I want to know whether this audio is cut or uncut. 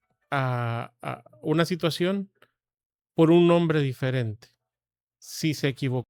uncut